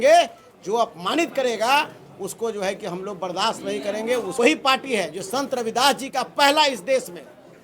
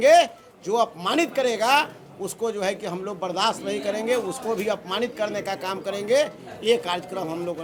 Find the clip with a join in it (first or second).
first